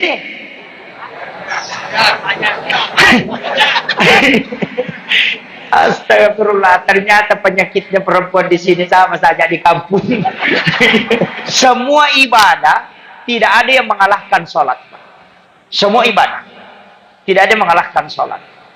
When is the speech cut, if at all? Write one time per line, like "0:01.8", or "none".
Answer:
0:11.4